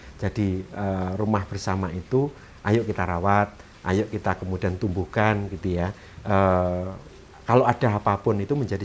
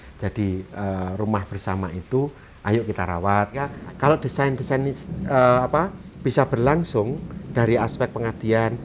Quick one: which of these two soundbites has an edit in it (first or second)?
second